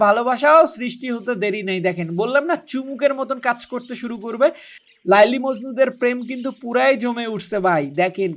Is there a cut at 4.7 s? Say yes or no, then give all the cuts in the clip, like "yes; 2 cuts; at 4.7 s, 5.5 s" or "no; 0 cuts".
yes; 1 cut; at 4.7 s